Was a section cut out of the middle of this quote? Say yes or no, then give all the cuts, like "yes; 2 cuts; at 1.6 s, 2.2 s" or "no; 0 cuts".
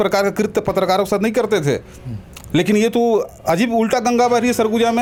no; 0 cuts